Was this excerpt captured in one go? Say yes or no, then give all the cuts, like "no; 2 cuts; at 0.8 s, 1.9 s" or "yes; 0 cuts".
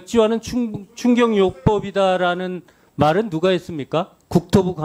yes; 0 cuts